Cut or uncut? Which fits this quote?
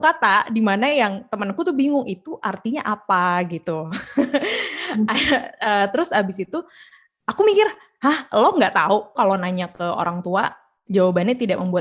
cut